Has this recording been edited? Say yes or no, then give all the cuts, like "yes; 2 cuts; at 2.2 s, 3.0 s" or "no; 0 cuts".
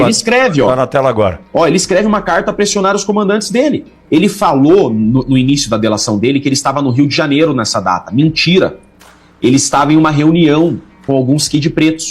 yes; 1 cut; at 3.9 s